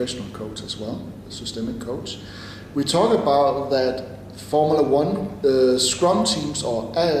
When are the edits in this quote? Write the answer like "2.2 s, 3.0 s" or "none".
6.3 s